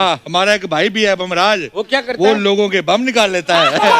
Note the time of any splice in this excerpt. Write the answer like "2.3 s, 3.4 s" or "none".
none

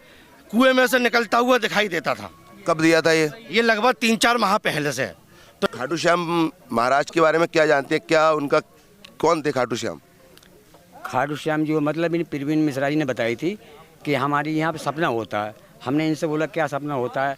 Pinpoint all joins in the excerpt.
5.7 s

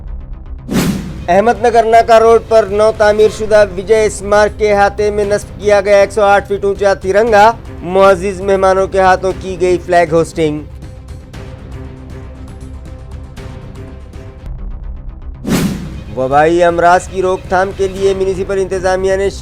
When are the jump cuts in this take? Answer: 1.1 s

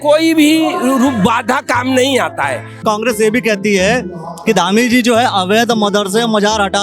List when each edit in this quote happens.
2.8 s

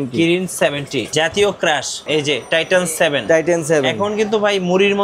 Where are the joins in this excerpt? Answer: 1.1 s

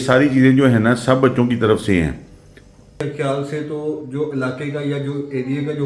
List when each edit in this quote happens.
3.0 s

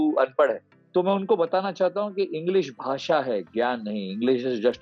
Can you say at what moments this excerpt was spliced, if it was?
none

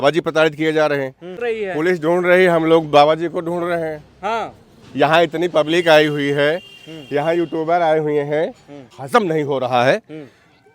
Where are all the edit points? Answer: 1.3 s, 8.9 s

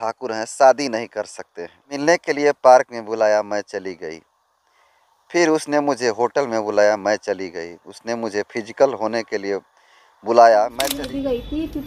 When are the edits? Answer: 2.0 s, 10.9 s

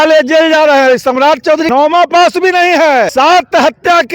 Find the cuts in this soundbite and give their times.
1.7 s, 3.1 s

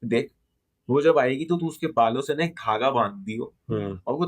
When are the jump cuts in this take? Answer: none

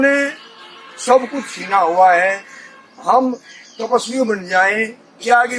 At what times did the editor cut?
none

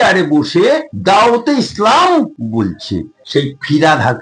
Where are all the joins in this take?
3.2 s

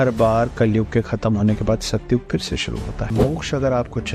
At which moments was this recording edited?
3.1 s

